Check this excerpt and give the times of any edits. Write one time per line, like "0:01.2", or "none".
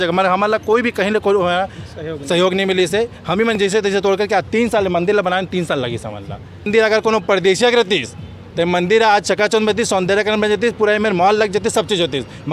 none